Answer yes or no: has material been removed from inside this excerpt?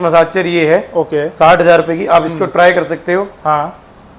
no